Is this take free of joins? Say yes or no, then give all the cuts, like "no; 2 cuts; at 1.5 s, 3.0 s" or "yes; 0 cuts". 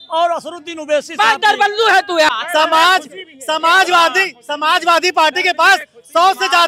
no; 1 cut; at 2.3 s